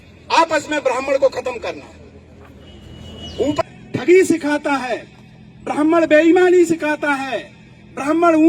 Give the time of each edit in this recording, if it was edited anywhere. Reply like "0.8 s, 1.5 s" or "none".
3.6 s